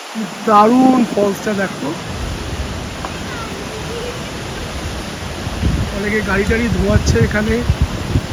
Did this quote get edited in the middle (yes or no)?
no